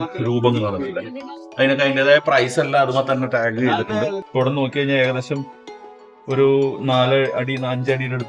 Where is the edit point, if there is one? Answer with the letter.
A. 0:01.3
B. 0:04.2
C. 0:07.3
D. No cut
B